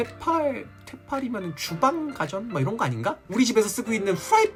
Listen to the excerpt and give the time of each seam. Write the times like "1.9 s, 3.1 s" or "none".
none